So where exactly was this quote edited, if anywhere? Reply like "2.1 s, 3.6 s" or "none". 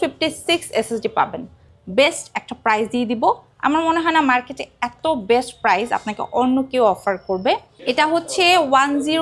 7.8 s